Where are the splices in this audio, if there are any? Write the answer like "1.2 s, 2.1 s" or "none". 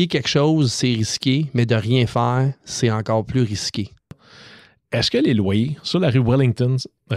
4.3 s